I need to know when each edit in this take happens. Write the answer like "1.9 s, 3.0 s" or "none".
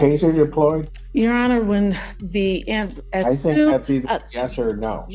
0.9 s